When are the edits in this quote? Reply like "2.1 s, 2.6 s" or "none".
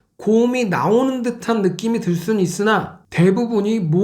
3.0 s